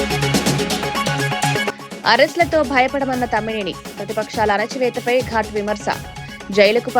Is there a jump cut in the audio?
yes; 1 cut; at 1.6 s

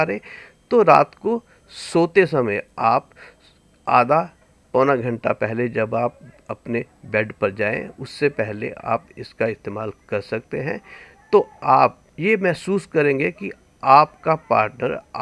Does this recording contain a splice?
no; 0 cuts

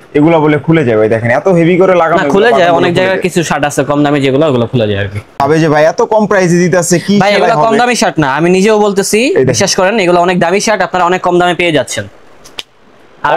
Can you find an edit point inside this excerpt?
yes; 1 cut; at 5.4 s

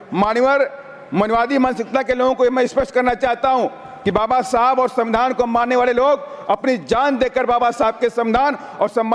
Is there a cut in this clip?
no; 0 cuts

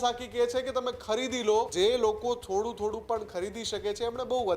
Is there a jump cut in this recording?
yes; 1 cut; at 1.7 s

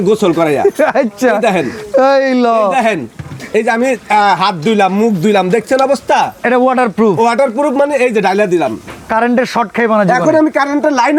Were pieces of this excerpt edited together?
no; 0 cuts

